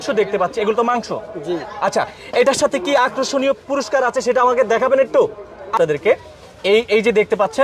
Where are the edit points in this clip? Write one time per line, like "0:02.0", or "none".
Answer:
0:05.8